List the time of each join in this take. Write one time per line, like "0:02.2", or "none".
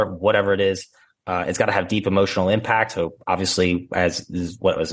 none